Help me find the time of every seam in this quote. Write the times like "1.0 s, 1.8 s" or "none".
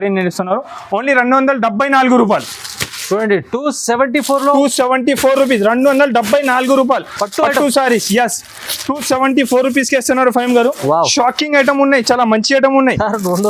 none